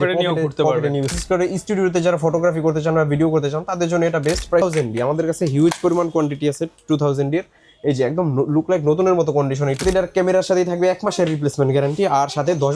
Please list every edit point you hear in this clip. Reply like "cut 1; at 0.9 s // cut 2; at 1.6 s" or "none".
cut 1; at 1.1 s // cut 2; at 4.6 s // cut 3; at 9.8 s